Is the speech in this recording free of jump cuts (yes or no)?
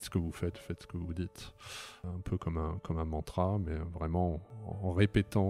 no